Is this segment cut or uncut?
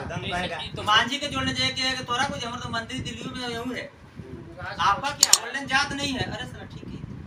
cut